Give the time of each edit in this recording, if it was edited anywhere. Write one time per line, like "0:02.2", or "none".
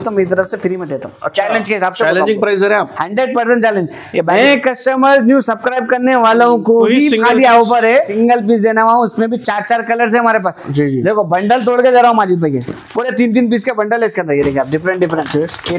0:04.3
0:08.1